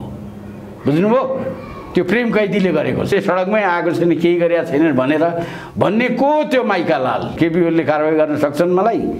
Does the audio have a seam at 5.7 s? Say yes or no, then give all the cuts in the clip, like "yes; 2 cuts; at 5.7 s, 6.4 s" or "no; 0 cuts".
no; 2 cuts; at 3.1 s, 7.4 s